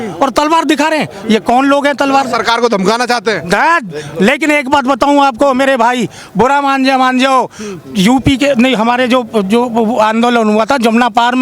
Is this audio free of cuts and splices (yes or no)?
yes